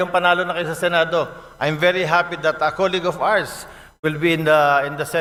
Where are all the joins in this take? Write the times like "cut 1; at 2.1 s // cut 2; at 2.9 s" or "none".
none